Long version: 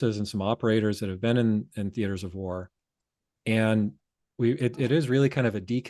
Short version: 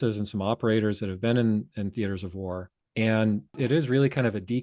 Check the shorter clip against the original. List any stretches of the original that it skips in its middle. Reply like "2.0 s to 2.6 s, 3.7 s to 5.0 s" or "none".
2.8 s to 3.3 s, 4.0 s to 4.7 s

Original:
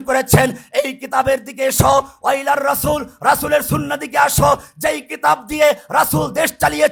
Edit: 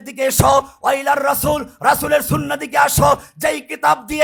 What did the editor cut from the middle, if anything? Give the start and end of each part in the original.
none

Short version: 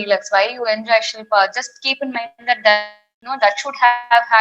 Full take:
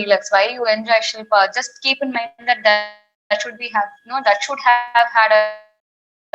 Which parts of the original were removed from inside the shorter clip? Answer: 3.1 s to 4.0 s

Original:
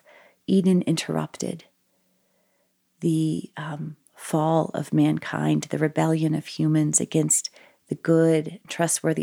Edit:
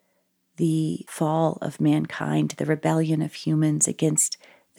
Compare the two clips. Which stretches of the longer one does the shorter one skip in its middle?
3.5 s to 4.2 s

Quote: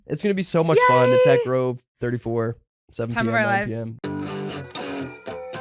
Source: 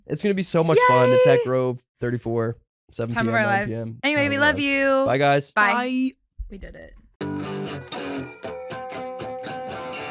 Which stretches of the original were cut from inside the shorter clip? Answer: 3.9 s to 7.1 s

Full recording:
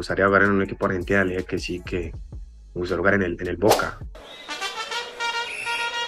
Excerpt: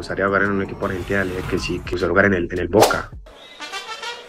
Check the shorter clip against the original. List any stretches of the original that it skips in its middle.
1.9 s to 2.8 s

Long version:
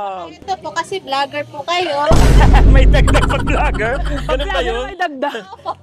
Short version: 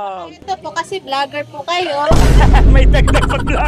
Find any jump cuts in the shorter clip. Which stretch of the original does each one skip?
none

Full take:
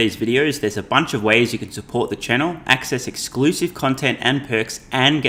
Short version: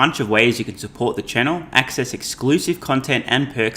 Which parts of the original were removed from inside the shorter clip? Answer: none

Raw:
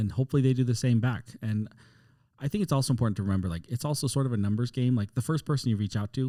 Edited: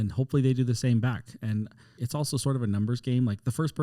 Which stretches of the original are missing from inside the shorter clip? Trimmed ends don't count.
1.9 s to 3.6 s

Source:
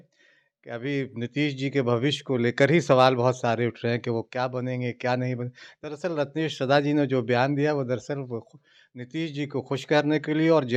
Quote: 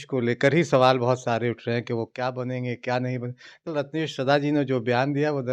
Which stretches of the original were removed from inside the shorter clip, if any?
5.8 s to 6.1 s

